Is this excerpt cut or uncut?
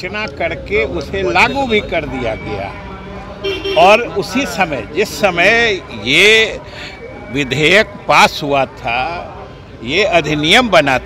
uncut